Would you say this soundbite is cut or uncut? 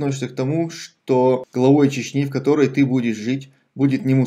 cut